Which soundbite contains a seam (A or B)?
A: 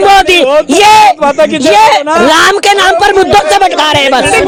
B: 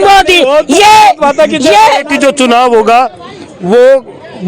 B